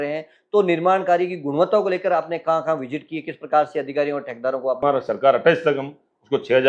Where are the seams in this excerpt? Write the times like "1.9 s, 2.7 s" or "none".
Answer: 4.8 s